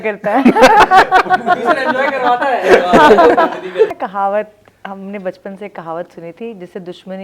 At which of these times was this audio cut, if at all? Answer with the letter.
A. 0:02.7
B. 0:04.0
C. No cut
B